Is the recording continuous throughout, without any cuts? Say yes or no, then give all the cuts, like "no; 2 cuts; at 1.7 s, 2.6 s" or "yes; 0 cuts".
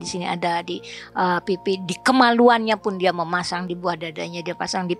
yes; 0 cuts